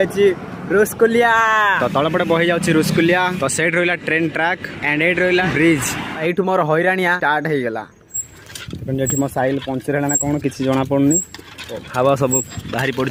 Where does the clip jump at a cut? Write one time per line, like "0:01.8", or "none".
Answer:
none

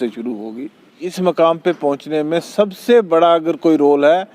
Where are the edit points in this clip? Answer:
0:01.0

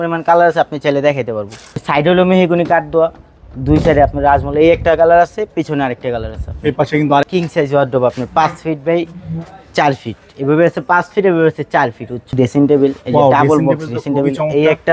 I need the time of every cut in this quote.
0:01.8
0:07.2
0:12.3

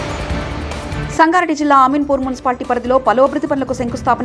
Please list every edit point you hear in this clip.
0:01.0

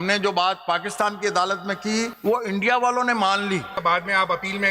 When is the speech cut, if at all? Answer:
0:02.1
0:03.8

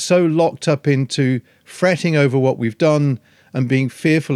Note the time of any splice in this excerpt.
none

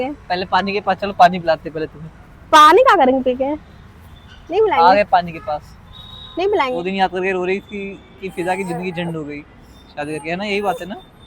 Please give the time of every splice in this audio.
0:06.8

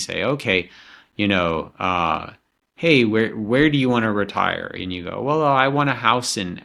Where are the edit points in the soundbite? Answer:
none

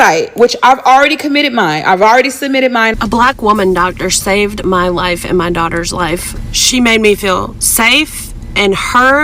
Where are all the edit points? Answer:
0:02.9
0:06.3

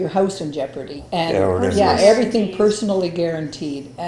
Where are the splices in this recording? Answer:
0:01.0

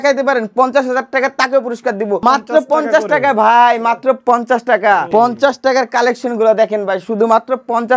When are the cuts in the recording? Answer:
0:02.2
0:05.1

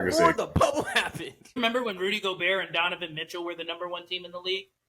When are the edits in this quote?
0:01.6

